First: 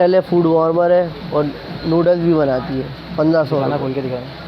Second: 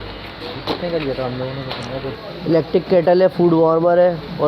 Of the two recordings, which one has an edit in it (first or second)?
second